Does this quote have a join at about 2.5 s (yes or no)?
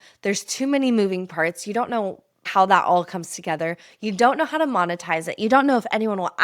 yes